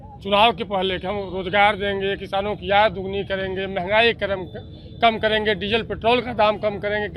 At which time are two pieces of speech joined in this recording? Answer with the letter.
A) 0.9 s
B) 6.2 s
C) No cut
C